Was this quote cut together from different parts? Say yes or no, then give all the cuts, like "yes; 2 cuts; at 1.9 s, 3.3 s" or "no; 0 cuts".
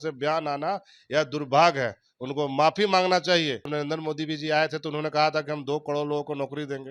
yes; 1 cut; at 3.7 s